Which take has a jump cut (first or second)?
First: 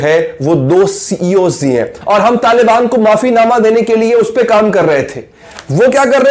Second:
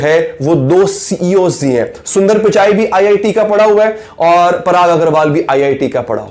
first